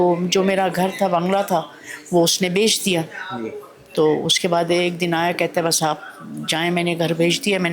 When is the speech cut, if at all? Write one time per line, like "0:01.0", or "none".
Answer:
none